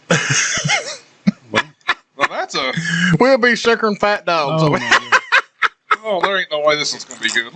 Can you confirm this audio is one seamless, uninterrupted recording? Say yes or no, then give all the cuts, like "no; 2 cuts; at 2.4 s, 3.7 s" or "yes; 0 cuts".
yes; 0 cuts